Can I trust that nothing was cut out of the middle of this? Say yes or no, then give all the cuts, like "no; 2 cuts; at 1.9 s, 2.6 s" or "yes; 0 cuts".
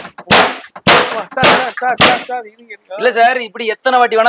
yes; 0 cuts